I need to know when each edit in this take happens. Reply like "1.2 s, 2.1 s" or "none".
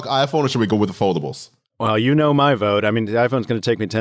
2.1 s